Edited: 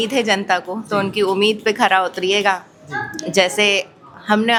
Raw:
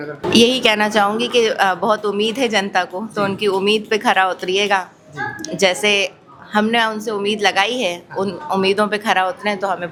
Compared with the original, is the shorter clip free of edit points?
yes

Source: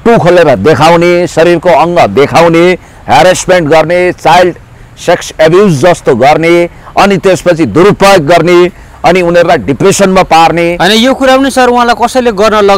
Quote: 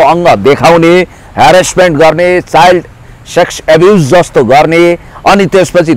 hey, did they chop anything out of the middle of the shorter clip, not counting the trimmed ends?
no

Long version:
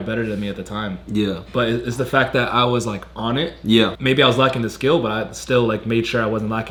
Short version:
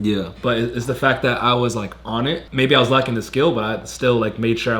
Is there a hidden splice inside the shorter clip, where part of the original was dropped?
yes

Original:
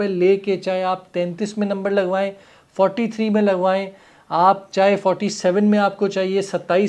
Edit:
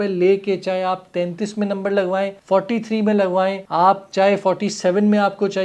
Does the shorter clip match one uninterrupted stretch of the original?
no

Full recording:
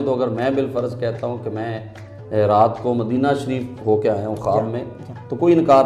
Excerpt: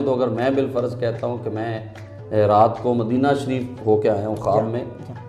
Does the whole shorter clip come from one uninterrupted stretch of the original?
yes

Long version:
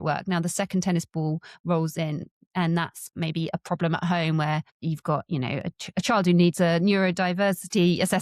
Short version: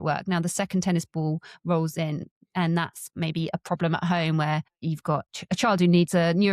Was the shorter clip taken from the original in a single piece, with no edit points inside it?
no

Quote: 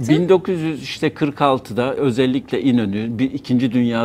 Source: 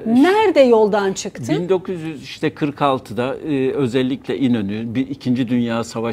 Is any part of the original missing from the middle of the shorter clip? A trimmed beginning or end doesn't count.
yes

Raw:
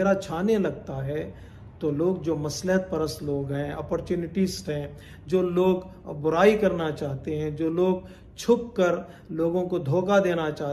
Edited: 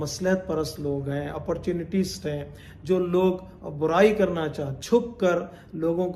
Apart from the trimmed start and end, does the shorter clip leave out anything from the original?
yes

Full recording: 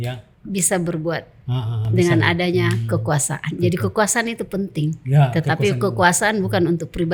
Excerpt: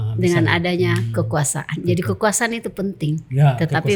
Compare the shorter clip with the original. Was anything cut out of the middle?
no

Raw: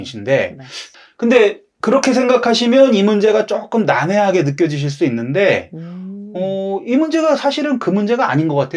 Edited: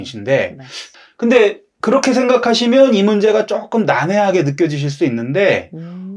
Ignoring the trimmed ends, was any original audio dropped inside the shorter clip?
no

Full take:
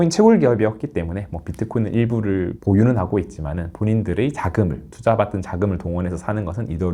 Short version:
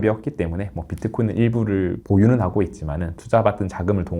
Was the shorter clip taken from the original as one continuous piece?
no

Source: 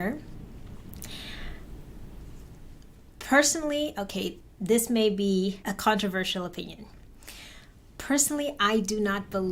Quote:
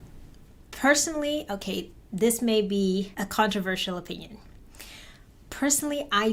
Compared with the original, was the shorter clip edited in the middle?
no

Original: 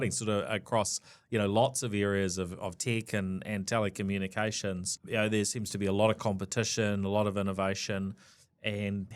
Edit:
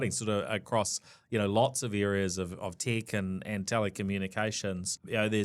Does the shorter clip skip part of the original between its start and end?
no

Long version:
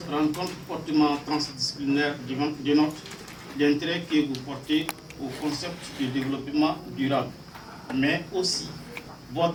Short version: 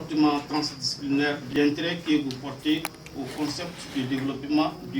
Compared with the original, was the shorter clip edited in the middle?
yes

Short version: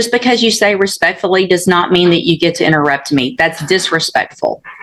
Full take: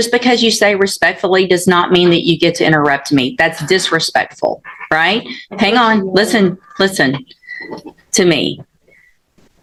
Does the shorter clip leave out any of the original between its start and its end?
no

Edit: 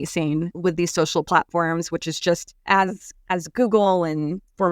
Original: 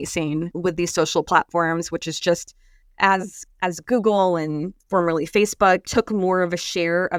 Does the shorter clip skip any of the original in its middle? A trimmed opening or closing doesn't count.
yes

